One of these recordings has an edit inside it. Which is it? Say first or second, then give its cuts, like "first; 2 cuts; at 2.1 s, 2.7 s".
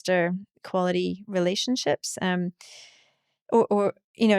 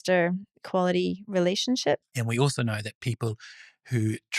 second; 1 cut; at 2.1 s